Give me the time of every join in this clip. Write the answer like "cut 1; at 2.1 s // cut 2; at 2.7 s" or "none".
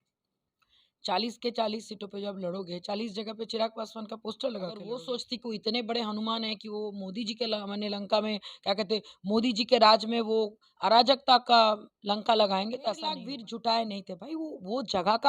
cut 1; at 5.0 s // cut 2; at 13.3 s